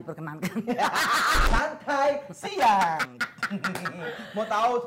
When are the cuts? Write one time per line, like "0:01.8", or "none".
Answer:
0:01.4